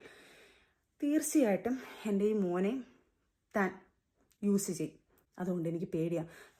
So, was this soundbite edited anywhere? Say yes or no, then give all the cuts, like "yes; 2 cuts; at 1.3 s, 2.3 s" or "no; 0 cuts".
no; 0 cuts